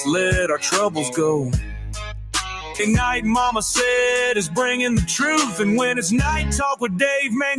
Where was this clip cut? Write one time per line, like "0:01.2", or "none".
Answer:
0:02.8